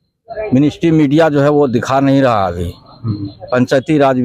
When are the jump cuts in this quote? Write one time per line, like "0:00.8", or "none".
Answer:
none